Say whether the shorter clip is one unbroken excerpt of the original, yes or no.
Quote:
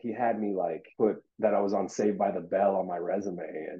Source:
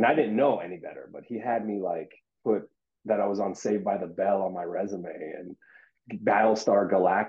no